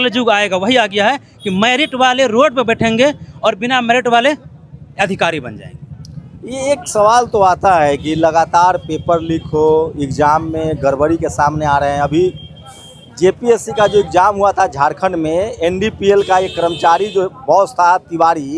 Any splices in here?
no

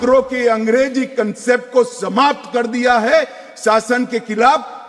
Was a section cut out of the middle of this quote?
no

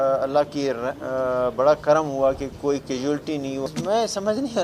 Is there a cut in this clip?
yes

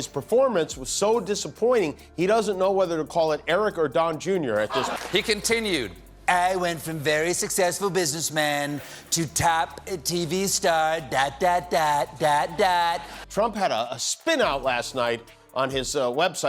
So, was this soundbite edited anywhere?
no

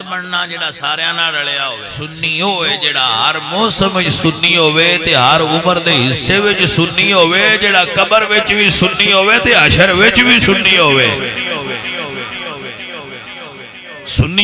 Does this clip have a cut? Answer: yes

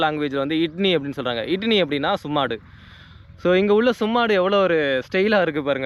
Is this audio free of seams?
yes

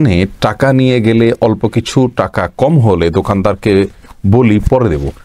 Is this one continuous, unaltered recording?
yes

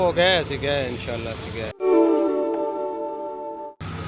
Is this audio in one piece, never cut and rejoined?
yes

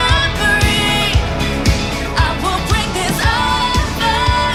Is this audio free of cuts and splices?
yes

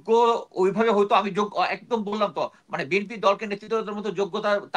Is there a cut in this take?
no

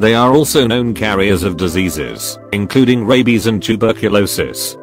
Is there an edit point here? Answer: no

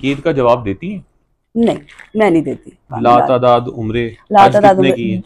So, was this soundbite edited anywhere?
yes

